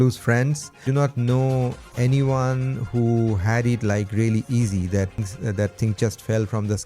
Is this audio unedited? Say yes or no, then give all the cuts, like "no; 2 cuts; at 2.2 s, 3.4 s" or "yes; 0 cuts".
no; 2 cuts; at 0.9 s, 5.2 s